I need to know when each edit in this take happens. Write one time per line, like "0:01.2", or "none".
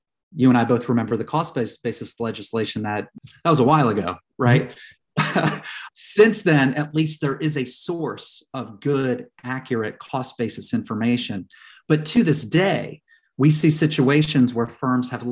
0:03.2
0:05.8